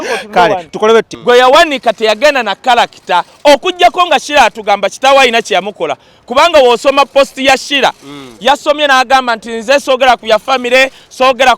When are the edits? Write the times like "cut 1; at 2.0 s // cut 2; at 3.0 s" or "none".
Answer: cut 1; at 1.1 s